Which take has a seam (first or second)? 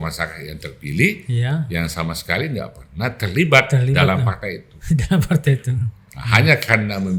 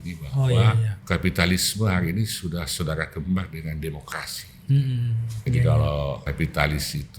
second